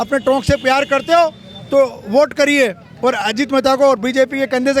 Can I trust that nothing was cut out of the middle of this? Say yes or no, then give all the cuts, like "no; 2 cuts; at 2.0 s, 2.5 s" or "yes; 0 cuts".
yes; 0 cuts